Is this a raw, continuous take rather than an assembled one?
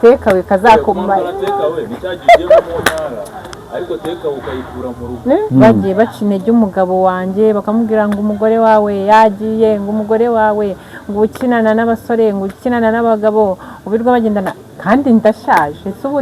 no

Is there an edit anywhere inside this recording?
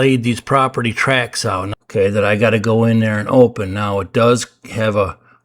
yes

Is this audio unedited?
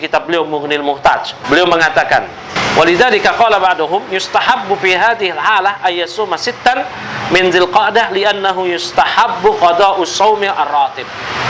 no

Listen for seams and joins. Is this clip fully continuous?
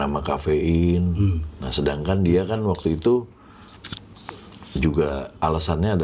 yes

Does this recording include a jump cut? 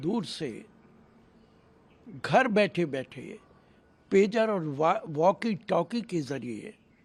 no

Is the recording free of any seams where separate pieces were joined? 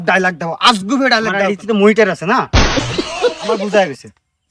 no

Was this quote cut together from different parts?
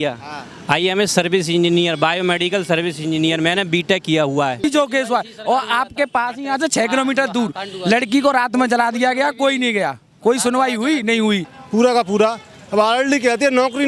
yes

